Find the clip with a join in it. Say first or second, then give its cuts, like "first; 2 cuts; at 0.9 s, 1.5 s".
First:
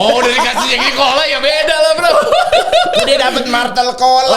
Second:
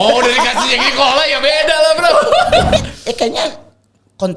second; 1 cut; at 2.8 s